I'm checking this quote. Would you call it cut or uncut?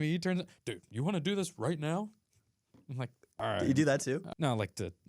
cut